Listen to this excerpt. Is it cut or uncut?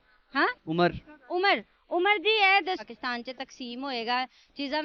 cut